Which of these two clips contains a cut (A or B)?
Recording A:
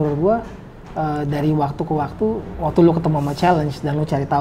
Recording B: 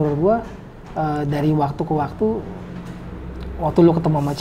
A